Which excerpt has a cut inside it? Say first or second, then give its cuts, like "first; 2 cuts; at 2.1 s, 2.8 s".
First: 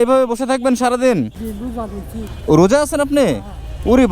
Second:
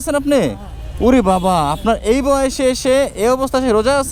first; 1 cut; at 1.4 s